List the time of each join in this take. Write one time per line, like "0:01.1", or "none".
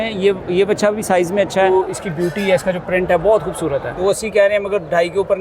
0:01.7
0:03.9